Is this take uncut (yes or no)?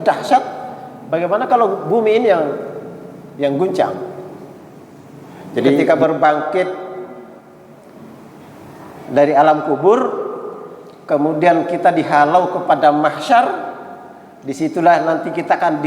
no